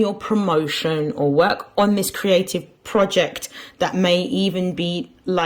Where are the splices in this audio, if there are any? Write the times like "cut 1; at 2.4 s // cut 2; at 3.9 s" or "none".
none